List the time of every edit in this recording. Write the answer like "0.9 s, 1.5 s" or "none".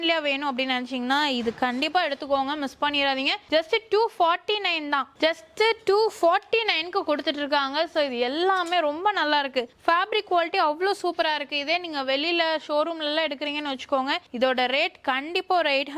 none